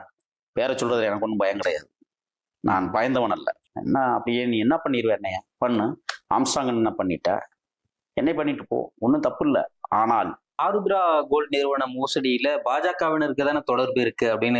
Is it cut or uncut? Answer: cut